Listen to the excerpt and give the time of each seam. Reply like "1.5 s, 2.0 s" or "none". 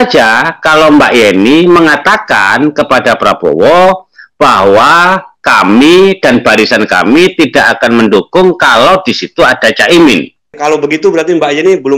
10.5 s